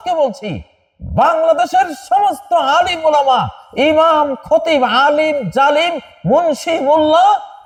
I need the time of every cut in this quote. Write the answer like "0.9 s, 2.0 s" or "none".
none